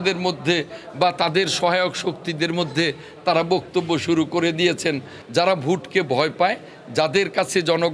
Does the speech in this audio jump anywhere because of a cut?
yes; 1 cut; at 5.2 s

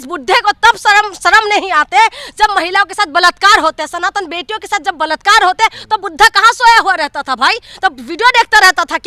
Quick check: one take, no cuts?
yes; 0 cuts

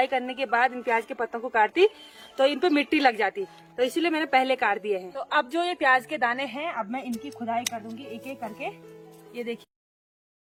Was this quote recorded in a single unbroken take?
yes; 0 cuts

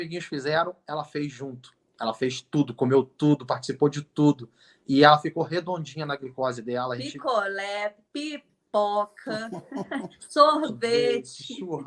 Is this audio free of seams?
yes; 0 cuts

